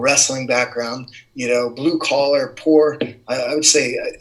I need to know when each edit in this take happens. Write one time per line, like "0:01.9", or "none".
none